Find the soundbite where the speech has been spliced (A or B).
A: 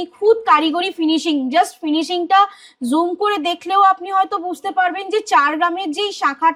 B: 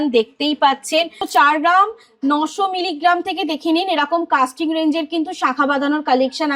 B